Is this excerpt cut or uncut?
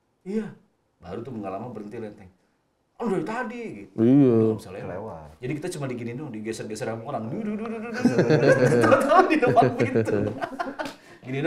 uncut